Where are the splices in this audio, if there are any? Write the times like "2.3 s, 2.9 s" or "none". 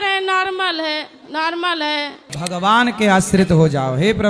2.3 s